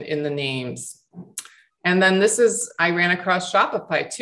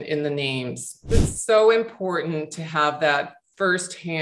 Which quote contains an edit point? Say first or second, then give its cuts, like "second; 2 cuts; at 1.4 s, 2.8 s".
second; 1 cut; at 1.1 s